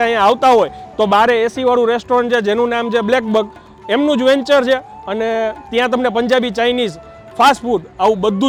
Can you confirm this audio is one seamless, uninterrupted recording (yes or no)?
yes